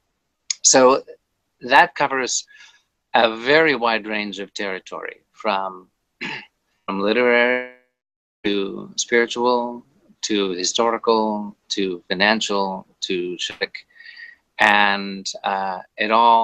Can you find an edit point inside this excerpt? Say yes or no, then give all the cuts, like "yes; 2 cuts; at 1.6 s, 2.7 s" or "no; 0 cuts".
no; 0 cuts